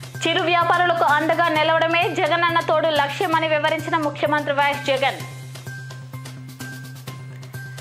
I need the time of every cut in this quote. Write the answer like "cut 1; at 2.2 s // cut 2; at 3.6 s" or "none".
none